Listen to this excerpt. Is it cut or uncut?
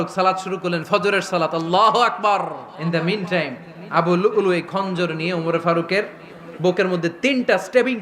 cut